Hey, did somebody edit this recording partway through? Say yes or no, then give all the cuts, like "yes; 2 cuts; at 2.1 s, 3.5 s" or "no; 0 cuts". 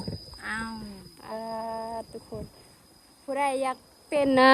no; 0 cuts